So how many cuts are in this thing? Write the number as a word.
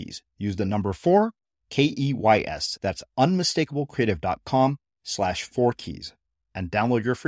zero